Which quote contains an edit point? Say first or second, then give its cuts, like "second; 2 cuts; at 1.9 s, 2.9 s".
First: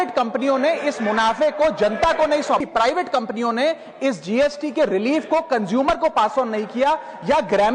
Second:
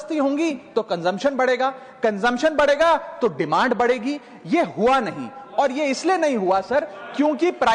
first; 1 cut; at 2.6 s